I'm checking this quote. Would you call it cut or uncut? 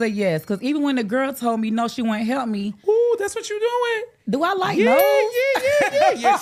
uncut